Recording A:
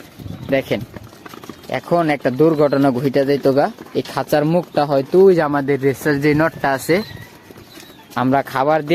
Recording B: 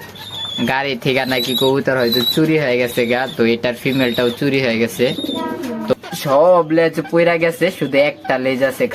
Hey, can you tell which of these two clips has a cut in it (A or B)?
B